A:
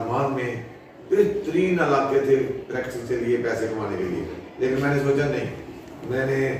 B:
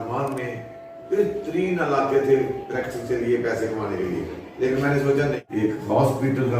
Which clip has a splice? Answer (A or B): B